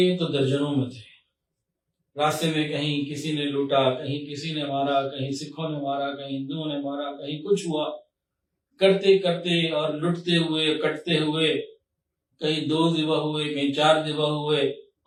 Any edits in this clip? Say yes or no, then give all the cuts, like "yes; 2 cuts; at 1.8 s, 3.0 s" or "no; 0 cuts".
no; 0 cuts